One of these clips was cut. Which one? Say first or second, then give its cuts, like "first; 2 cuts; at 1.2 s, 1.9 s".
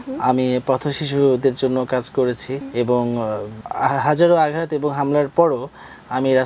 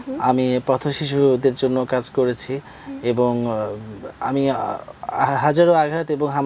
first; 2 cuts; at 2.6 s, 3.6 s